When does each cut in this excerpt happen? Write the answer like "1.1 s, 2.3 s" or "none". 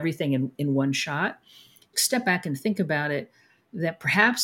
1.9 s